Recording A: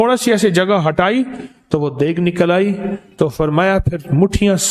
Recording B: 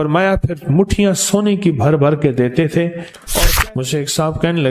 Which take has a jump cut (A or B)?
B